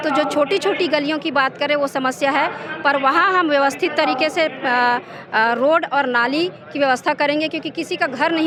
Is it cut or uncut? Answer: uncut